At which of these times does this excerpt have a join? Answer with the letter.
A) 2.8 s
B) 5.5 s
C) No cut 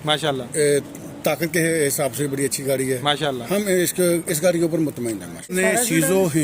B